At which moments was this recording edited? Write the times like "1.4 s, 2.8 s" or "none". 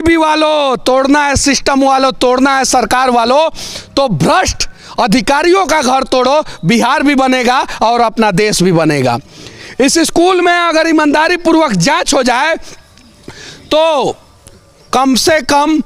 none